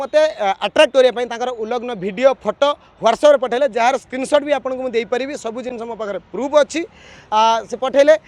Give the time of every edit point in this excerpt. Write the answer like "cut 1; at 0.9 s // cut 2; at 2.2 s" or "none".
none